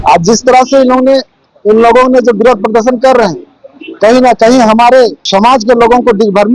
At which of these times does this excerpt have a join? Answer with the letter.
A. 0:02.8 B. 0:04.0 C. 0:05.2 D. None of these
C